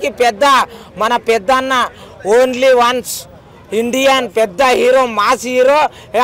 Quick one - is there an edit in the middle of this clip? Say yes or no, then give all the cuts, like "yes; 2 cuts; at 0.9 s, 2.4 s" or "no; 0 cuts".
no; 0 cuts